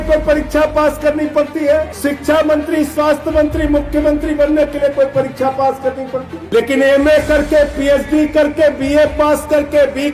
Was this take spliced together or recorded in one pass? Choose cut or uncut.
cut